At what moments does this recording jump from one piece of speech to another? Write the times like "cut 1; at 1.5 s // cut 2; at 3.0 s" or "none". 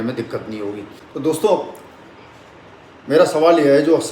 cut 1; at 1.0 s